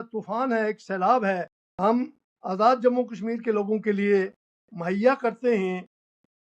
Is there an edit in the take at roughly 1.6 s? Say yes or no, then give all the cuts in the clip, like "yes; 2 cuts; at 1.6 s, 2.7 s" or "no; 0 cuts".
yes; 1 cut; at 1.6 s